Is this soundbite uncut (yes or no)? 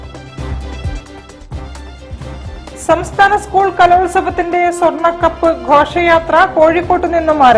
yes